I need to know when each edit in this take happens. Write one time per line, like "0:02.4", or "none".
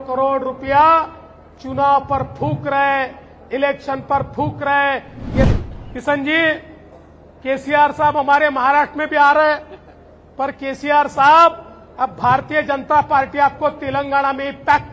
0:05.5